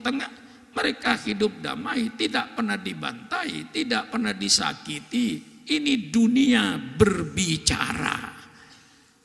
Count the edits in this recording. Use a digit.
0